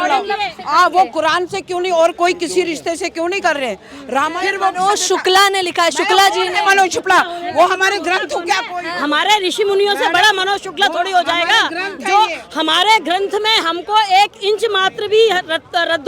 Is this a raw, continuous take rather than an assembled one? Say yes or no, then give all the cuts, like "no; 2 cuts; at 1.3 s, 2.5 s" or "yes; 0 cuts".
no; 1 cut; at 4.3 s